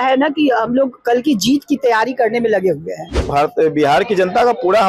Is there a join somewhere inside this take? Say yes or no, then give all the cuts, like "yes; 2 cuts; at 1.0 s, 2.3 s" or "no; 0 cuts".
yes; 1 cut; at 3.3 s